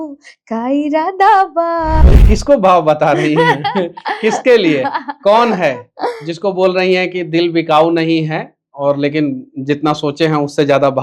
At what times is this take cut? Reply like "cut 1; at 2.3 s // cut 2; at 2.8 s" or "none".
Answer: cut 1; at 2.2 s